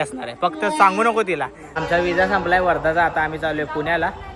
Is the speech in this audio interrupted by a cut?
yes; 1 cut; at 1.8 s

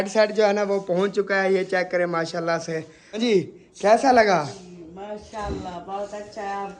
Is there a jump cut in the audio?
yes; 1 cut; at 3.2 s

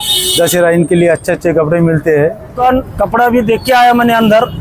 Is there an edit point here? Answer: yes; 1 cut; at 2.6 s

